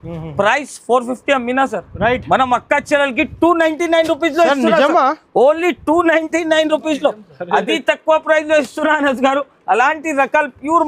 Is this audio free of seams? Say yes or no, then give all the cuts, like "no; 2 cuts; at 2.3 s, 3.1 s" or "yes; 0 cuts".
yes; 0 cuts